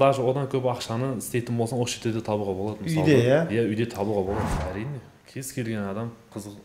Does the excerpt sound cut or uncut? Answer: cut